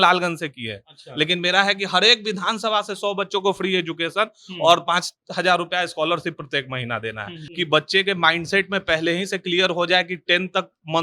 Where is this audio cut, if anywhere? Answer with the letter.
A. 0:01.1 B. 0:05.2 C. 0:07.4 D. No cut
C